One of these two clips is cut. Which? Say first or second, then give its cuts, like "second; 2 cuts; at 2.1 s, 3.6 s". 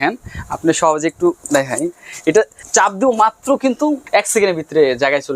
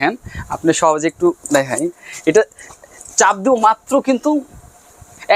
first; 2 cuts; at 2.6 s, 4.0 s